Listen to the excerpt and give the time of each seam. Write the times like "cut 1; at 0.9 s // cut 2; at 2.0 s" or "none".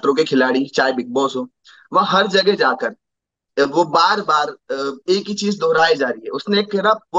none